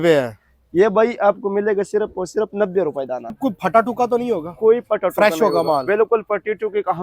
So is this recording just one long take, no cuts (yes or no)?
no